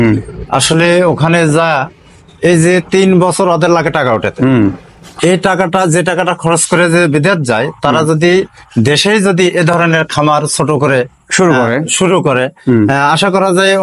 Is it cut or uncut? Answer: uncut